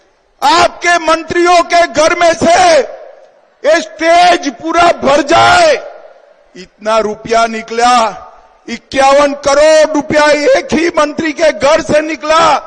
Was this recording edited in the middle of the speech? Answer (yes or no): no